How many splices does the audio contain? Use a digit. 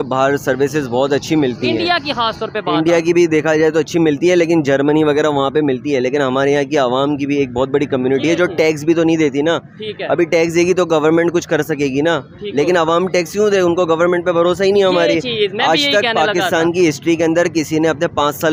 0